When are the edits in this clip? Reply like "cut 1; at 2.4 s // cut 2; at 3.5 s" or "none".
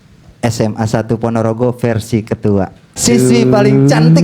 cut 1; at 2.8 s